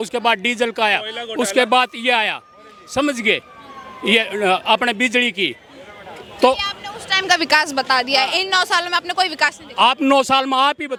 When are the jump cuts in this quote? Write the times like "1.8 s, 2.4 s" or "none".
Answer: none